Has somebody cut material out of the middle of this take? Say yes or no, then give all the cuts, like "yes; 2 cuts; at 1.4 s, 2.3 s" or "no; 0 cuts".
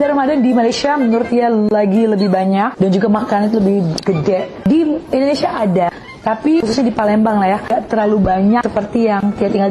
no; 0 cuts